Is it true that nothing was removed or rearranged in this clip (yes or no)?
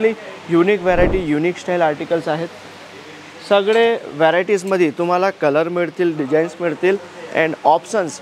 yes